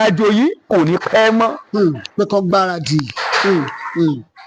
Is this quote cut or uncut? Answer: uncut